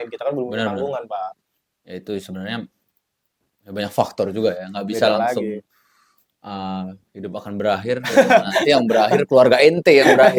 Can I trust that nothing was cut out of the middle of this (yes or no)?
yes